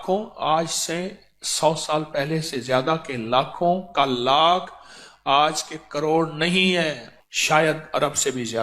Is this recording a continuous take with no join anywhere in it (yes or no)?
no